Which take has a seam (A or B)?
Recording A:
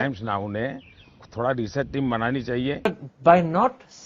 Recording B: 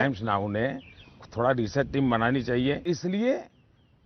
A